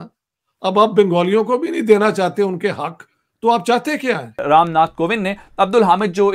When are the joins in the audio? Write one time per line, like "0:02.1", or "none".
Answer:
0:04.4